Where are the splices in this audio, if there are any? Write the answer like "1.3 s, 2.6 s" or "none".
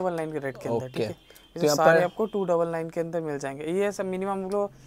none